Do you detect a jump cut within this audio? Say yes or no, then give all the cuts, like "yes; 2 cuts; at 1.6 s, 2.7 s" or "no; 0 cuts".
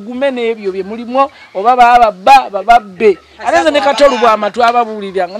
no; 0 cuts